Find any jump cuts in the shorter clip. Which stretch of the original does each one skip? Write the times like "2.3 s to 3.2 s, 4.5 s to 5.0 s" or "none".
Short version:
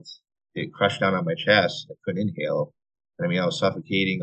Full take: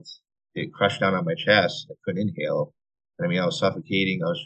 none